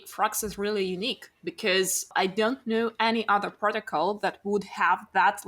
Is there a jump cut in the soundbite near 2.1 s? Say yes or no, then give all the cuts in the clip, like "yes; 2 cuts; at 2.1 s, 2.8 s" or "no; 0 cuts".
yes; 1 cut; at 2.1 s